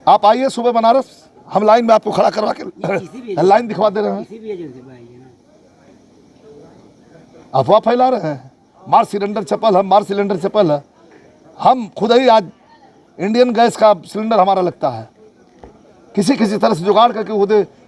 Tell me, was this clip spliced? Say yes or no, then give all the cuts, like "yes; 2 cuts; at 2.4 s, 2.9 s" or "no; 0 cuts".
no; 0 cuts